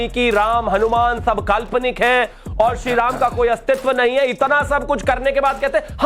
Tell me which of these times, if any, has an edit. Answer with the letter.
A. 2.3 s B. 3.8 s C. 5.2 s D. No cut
D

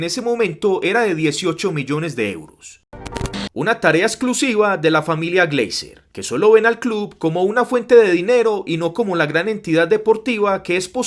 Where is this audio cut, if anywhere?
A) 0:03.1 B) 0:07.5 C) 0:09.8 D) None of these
A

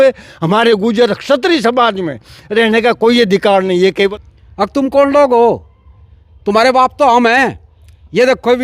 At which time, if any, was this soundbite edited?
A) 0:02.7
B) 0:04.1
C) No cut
B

